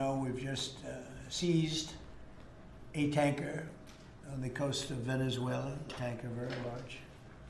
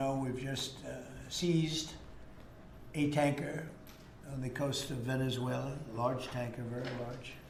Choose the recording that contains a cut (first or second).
first